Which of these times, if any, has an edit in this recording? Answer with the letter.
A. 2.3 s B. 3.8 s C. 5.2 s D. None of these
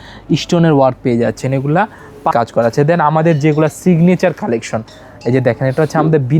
A